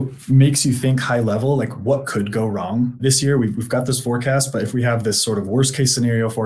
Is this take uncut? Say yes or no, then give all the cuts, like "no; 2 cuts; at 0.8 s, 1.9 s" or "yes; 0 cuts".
no; 1 cut; at 3.0 s